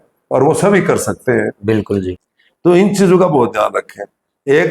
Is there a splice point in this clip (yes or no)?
yes